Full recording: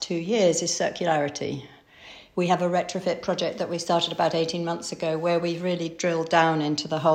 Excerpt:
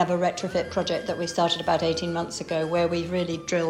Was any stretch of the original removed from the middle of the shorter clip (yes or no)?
no